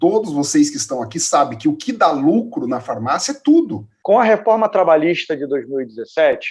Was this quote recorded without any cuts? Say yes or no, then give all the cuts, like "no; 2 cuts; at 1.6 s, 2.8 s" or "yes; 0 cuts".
no; 1 cut; at 3.9 s